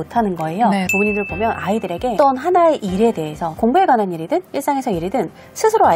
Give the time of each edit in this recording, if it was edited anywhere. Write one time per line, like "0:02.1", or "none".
0:00.9
0:02.1
0:03.4

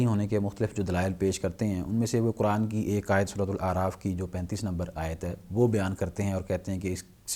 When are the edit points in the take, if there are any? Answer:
none

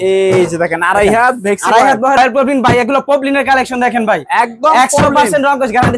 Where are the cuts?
0:02.2

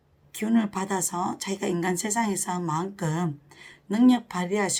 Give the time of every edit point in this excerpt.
none

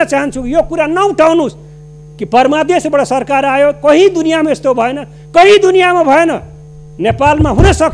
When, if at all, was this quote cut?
none

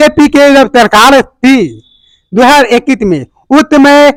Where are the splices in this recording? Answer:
none

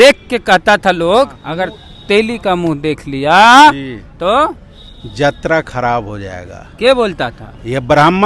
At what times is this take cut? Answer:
0:01.4

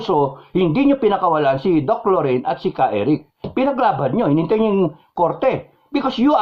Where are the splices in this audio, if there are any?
none

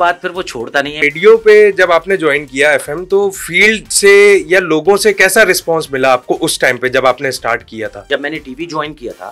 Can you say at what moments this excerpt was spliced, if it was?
0:01.1
0:08.1

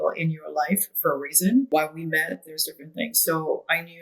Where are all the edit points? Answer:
0:01.7

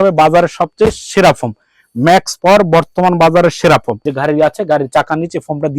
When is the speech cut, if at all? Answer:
0:04.0

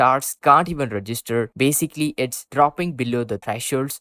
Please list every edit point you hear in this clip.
none

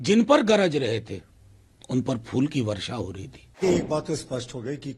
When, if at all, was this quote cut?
0:03.6

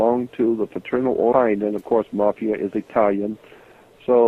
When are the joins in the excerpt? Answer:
none

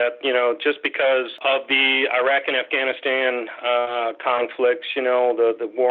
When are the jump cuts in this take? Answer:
0:01.3

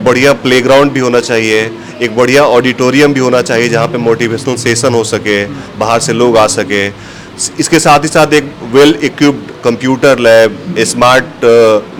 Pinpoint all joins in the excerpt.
none

